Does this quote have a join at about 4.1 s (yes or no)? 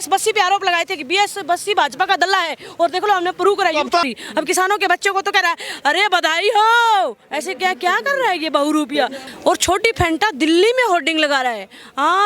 yes